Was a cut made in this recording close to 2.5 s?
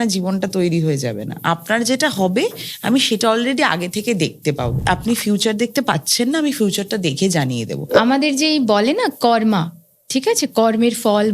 no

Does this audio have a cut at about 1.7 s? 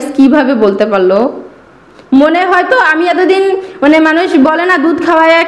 no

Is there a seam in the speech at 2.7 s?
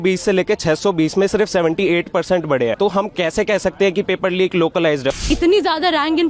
yes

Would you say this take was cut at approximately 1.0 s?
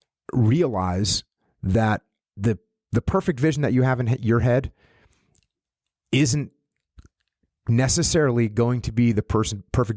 no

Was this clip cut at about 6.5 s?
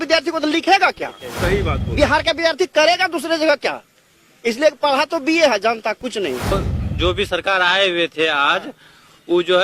yes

